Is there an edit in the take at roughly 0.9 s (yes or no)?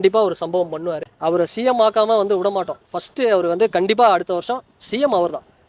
yes